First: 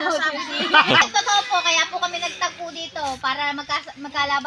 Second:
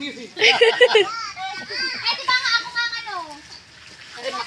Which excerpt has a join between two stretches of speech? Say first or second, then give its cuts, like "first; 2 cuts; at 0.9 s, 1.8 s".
first; 1 cut; at 1.0 s